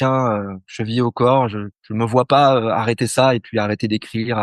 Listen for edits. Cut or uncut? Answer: uncut